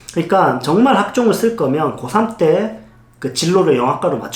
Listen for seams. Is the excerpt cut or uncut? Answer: uncut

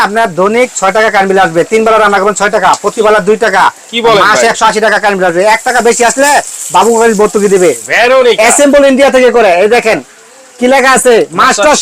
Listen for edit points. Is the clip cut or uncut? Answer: cut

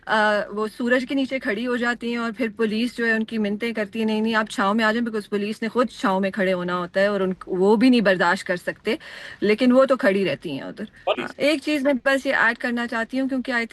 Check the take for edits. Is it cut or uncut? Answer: cut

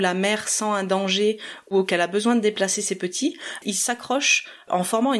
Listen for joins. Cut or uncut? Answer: cut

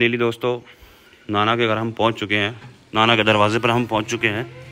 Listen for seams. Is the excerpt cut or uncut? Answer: uncut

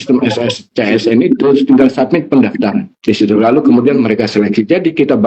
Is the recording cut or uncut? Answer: uncut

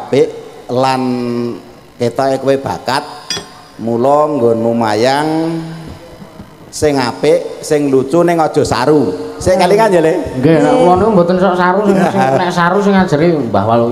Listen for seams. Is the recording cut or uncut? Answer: uncut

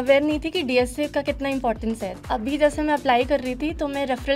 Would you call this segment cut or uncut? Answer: cut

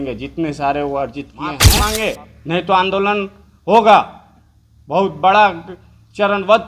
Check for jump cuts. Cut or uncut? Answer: cut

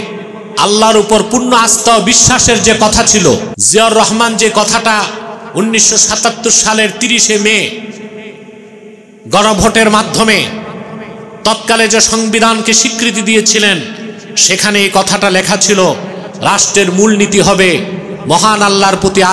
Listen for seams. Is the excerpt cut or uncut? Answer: cut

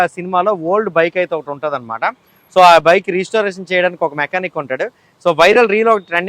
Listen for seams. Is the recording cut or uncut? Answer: uncut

